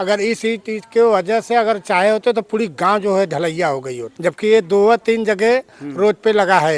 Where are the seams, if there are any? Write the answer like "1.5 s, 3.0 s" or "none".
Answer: 4.1 s